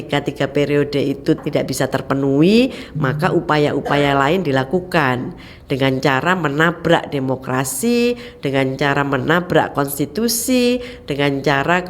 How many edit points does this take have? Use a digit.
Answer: 1